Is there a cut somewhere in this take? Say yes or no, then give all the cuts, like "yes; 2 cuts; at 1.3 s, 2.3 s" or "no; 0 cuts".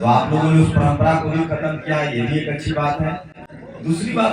no; 0 cuts